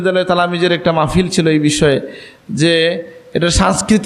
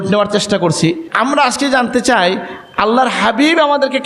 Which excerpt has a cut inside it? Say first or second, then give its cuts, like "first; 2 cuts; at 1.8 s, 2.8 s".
second; 1 cut; at 1.0 s